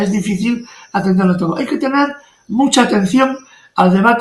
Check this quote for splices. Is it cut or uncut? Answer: uncut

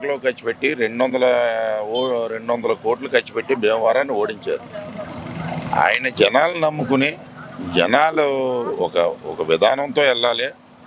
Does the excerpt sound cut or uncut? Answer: uncut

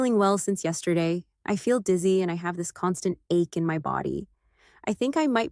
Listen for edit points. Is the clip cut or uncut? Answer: cut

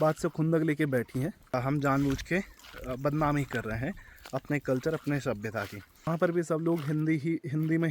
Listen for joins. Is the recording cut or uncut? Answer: cut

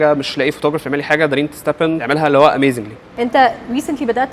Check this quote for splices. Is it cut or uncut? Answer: cut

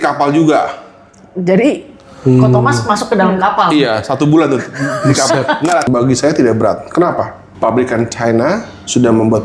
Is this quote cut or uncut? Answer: cut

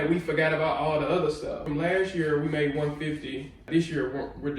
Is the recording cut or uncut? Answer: cut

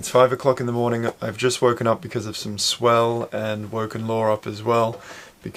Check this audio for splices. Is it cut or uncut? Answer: uncut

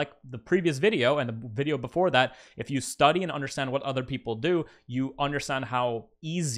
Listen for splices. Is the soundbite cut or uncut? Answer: uncut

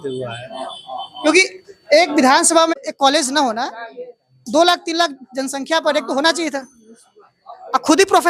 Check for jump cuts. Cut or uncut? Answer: cut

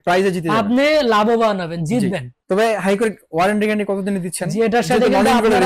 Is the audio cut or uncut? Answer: uncut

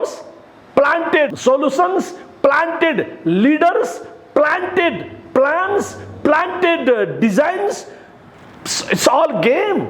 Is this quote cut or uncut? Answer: cut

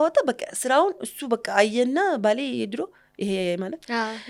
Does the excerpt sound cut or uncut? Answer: uncut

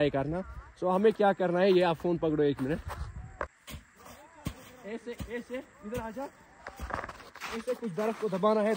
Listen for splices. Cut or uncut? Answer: cut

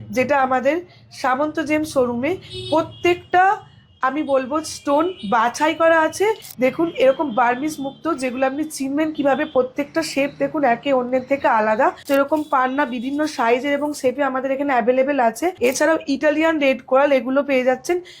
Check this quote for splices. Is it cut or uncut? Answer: cut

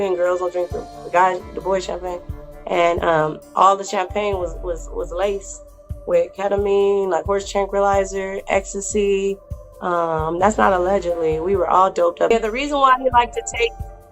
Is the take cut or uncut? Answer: cut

